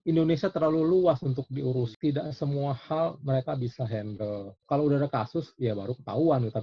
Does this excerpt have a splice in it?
yes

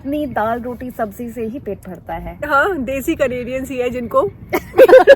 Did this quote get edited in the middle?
no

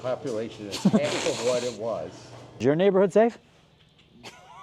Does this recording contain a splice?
yes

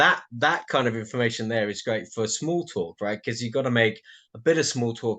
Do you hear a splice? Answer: no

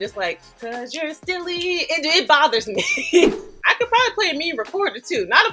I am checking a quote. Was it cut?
yes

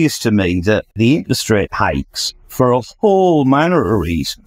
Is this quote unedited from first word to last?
no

